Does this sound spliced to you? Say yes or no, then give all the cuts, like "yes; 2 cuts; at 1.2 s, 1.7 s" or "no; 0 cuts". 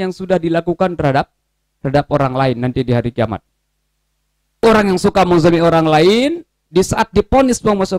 yes; 1 cut; at 4.6 s